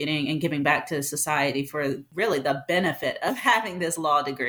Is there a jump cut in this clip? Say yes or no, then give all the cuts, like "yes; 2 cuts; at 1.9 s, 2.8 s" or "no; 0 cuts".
no; 0 cuts